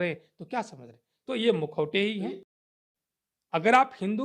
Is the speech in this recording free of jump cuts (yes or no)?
no